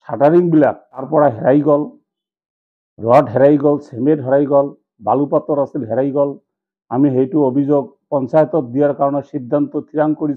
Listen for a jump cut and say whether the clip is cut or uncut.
cut